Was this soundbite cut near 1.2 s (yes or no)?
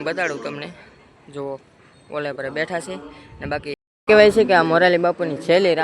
no